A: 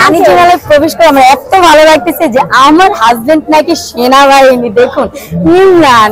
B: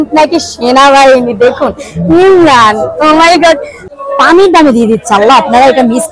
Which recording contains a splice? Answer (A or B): B